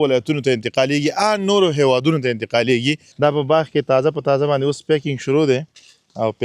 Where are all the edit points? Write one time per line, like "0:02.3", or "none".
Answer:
0:03.1